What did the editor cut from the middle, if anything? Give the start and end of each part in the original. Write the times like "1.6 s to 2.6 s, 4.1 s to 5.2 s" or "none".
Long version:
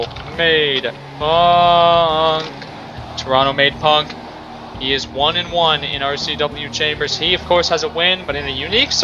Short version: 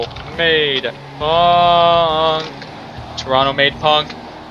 none